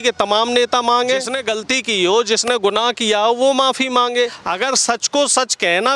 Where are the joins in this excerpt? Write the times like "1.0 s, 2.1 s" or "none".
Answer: 1.3 s, 4.4 s